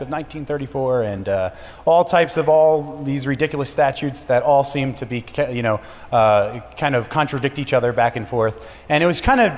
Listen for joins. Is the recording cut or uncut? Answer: cut